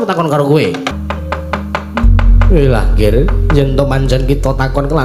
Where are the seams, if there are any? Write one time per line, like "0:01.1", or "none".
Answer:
0:00.9